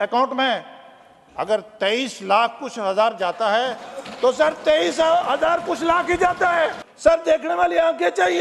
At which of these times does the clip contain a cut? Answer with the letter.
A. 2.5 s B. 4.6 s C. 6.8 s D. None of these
C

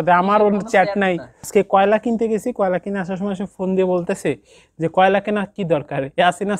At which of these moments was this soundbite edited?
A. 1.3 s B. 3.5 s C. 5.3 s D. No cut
A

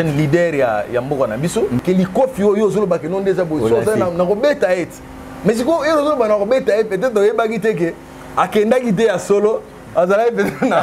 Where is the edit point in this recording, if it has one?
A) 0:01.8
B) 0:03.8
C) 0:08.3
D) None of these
A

